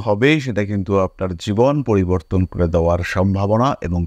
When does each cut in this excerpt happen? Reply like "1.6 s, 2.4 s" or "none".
none

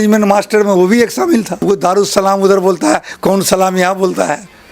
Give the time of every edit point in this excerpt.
1.5 s

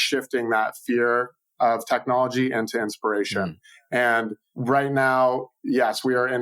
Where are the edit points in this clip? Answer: 4.5 s

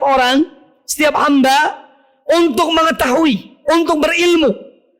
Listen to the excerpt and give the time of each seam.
none

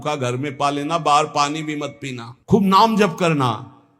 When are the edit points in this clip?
2.3 s

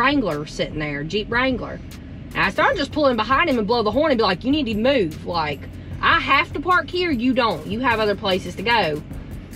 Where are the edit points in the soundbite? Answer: none

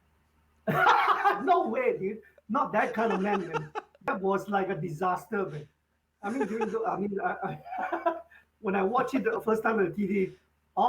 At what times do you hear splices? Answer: none

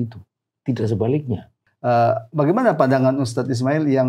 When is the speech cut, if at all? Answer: 1.6 s

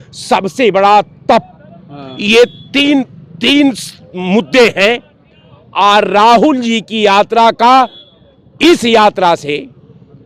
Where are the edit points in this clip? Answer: none

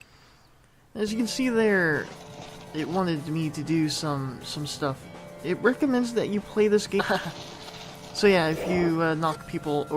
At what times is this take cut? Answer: none

